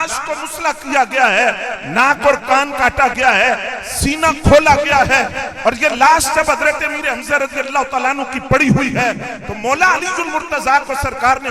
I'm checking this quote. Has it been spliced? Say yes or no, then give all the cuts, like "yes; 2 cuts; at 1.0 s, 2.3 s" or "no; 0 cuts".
no; 0 cuts